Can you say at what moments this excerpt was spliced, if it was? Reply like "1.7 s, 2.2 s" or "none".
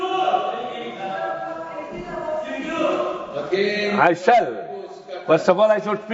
none

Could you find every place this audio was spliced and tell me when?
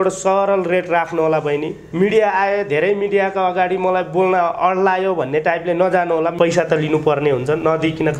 1.8 s, 6.3 s

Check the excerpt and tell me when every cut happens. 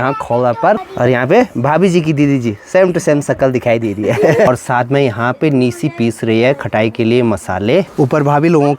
0.9 s, 4.5 s, 7.9 s

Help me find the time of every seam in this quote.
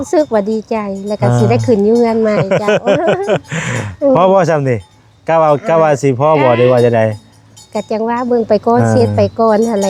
none

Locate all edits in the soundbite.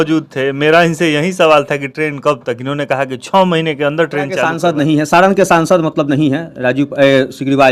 4.5 s

